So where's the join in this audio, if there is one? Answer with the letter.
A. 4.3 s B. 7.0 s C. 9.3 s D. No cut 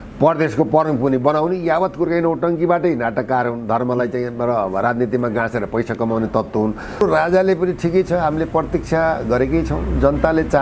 B